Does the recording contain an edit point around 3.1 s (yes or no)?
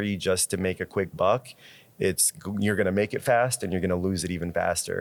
no